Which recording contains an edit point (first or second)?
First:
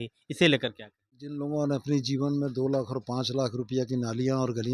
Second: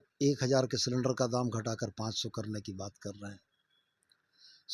first